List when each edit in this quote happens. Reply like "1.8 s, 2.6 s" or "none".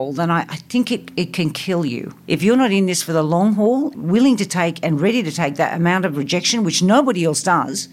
2.1 s, 3.9 s